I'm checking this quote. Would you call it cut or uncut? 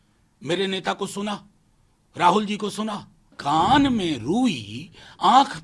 cut